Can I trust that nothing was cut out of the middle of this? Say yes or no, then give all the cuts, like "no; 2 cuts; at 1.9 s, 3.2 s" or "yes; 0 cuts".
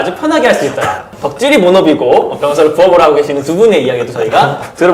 no; 1 cut; at 1.1 s